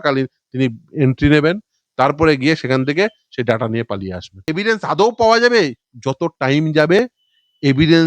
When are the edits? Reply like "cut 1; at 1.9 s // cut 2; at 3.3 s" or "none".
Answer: cut 1; at 4.5 s